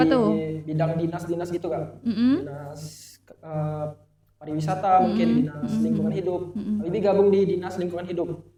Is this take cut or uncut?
uncut